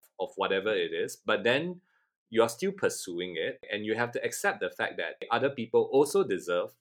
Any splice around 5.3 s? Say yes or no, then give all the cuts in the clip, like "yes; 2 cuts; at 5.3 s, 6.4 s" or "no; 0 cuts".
yes; 2 cuts; at 3.7 s, 5.3 s